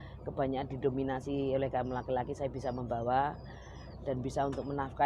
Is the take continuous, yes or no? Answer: yes